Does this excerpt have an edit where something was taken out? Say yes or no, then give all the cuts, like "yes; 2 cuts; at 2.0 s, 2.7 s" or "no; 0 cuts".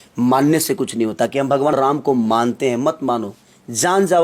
yes; 1 cut; at 1.7 s